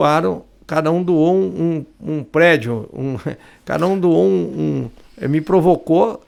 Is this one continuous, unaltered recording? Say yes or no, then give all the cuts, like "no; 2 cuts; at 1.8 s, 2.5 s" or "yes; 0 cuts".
yes; 0 cuts